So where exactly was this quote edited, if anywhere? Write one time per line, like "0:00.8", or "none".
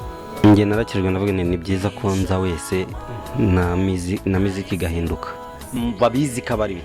0:05.8